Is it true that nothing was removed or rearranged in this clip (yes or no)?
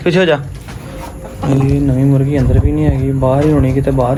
yes